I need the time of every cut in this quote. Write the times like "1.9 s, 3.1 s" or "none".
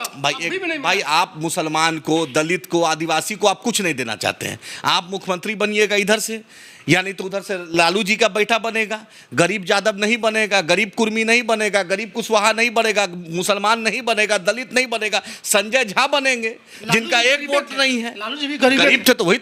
none